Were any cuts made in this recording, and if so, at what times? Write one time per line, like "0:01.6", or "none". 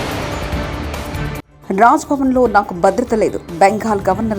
0:01.5